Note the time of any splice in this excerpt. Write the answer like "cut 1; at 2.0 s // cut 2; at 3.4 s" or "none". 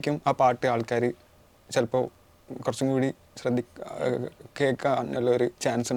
none